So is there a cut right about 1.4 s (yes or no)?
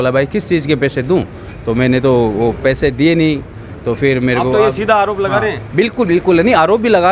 no